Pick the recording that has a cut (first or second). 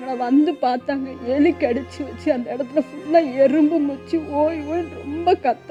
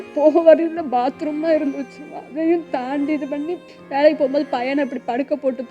second